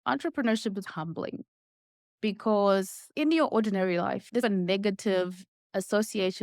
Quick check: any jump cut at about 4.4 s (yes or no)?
yes